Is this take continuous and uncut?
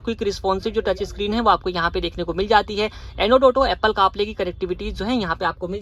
yes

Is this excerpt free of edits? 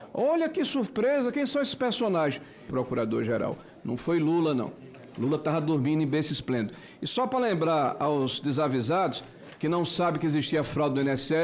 yes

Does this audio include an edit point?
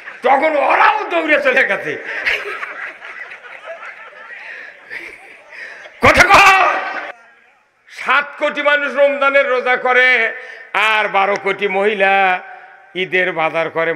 yes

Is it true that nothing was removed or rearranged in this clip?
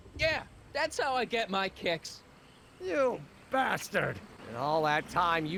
yes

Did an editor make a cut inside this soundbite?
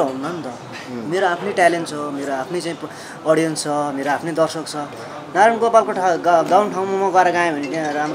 no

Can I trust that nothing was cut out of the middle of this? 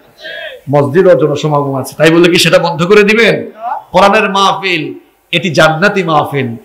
yes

